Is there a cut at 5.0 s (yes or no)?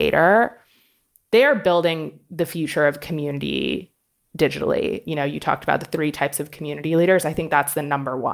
yes